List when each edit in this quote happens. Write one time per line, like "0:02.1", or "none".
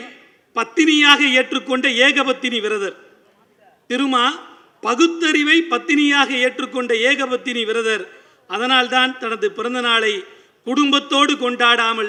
none